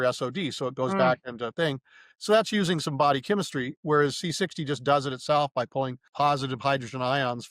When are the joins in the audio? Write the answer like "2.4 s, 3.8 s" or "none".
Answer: 6.0 s